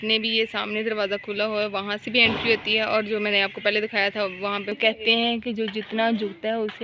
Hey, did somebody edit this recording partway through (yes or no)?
yes